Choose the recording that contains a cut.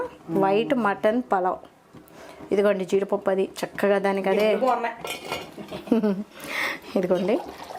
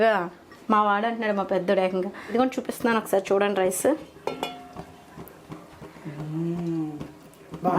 second; 1 cut; at 2.3 s

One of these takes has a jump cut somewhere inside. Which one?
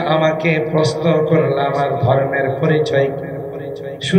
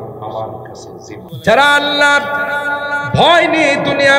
second; 1 cut; at 1.2 s

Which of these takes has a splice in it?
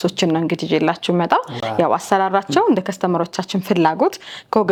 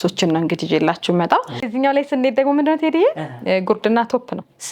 second; 1 cut; at 1.6 s

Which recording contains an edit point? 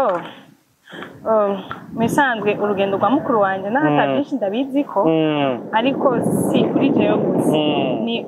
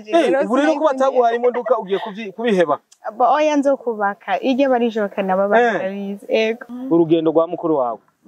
second; 1 cut; at 6.6 s

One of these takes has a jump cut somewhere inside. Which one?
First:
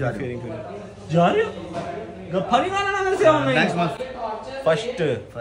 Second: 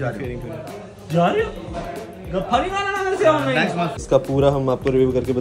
second; 1 cut; at 4.0 s

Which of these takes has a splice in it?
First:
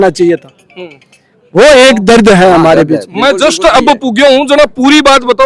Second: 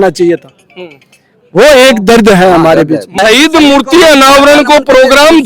second; 1 cut; at 3.1 s

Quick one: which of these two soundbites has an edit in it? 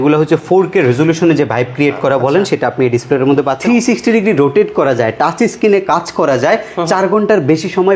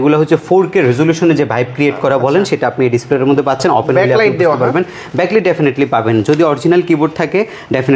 first; 1 cut; at 3.6 s

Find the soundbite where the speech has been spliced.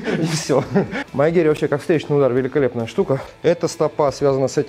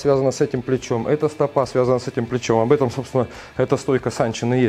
first; 2 cuts; at 1.0 s, 3.2 s

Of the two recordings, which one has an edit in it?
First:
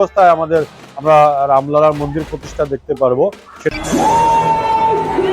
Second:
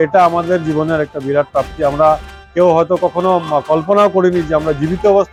first; 1 cut; at 3.5 s

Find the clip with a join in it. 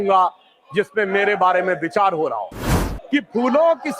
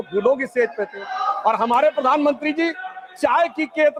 first; 1 cut; at 2.7 s

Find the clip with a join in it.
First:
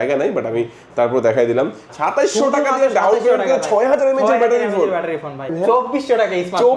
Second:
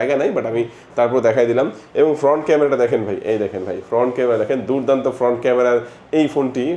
first; 2 cuts; at 1.8 s, 5.5 s

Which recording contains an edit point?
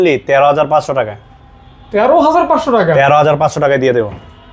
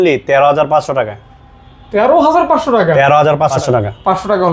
second; 1 cut; at 3.6 s

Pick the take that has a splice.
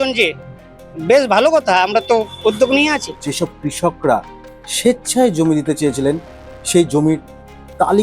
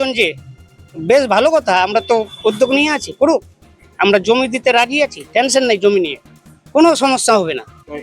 first; 1 cut; at 3.1 s

